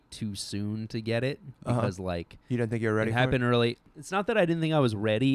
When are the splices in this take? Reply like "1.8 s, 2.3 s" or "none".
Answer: 3.9 s

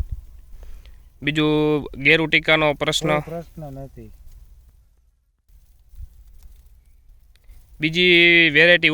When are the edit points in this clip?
5.5 s

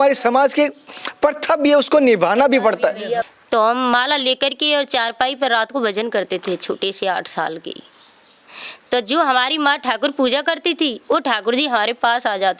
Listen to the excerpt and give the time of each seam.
3.3 s

